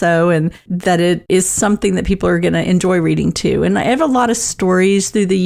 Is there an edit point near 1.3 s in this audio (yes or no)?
no